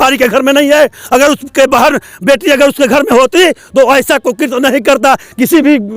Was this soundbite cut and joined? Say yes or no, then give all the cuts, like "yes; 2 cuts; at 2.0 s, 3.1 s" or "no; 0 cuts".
no; 0 cuts